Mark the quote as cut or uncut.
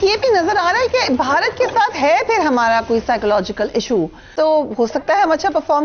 cut